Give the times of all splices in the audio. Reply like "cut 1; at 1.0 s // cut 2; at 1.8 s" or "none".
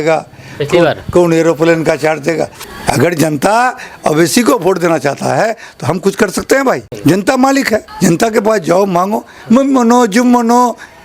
cut 1; at 2.6 s // cut 2; at 6.9 s // cut 3; at 7.9 s